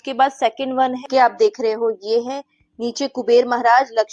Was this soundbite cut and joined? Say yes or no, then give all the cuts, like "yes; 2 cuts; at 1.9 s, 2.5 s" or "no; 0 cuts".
yes; 1 cut; at 1.0 s